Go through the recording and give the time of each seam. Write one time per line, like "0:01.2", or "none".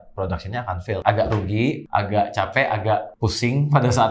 0:01.0
0:01.8
0:03.1